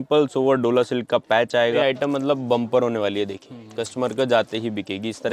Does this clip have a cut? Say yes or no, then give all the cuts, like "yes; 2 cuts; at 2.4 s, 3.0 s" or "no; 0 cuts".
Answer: yes; 1 cut; at 1.8 s